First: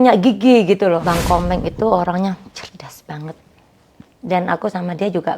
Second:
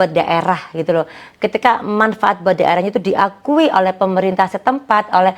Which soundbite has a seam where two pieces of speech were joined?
first; 1 cut; at 1.0 s

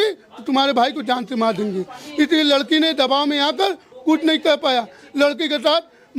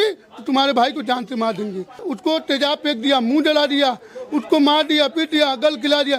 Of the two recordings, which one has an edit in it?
second; 1 cut; at 2.0 s

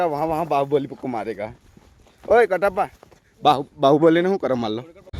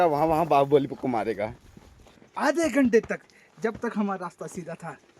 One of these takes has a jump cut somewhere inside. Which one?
second; 1 cut; at 2.2 s

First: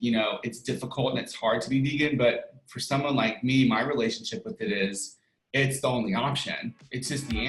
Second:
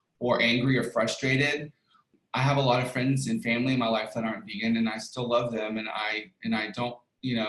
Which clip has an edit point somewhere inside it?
second; 1 cut; at 2.2 s

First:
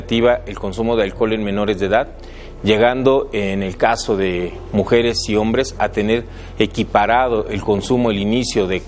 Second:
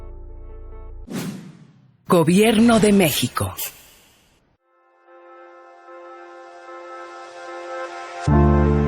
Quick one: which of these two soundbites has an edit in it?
second; 1 cut; at 4.7 s

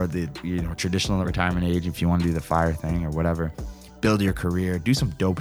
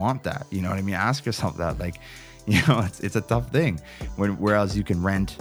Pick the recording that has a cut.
first; 1 cut; at 1.3 s

